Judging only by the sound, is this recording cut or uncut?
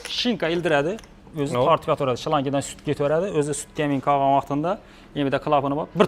uncut